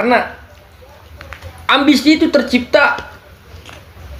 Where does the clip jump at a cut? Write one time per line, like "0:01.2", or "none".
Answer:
none